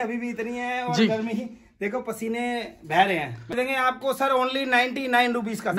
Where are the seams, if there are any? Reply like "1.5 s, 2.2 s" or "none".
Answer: 3.5 s